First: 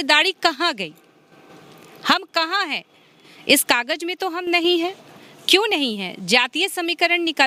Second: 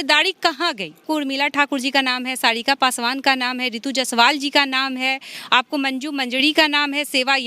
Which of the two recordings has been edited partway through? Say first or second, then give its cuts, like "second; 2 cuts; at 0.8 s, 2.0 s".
second; 1 cut; at 1.0 s